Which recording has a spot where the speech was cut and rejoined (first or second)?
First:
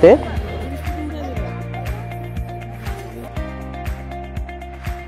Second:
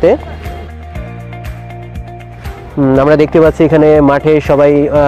second